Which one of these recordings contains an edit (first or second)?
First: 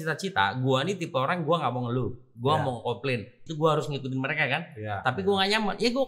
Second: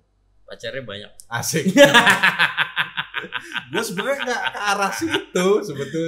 first